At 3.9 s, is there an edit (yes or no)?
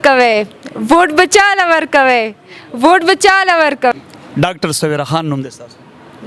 yes